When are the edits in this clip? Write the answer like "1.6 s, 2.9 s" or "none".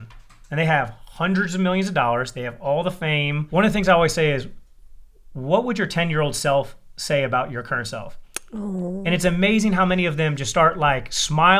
3.4 s